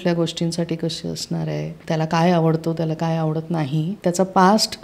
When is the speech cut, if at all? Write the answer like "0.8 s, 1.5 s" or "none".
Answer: 1.8 s, 3.9 s